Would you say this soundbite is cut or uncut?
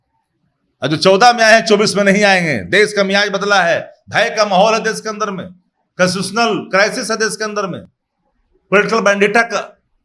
uncut